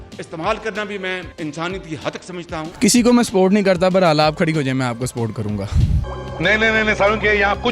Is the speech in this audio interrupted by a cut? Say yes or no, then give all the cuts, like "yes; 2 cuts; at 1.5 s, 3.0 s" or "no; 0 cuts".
yes; 1 cut; at 1.3 s